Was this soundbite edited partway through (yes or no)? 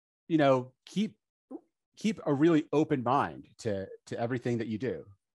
no